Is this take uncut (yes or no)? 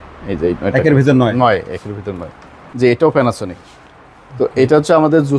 no